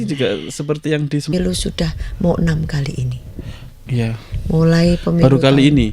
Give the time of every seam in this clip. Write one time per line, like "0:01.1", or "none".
0:01.3